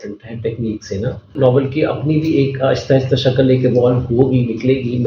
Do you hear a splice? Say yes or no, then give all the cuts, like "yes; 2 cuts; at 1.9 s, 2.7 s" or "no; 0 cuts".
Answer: yes; 1 cut; at 1.3 s